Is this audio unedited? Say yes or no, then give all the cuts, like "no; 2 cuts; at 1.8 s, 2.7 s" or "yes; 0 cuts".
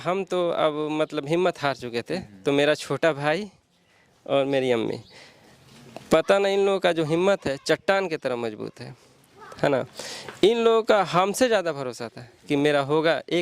yes; 0 cuts